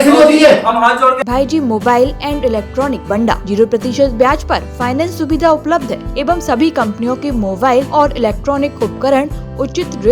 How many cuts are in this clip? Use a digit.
4